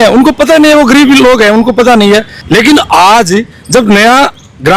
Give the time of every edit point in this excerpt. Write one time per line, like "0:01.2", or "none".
none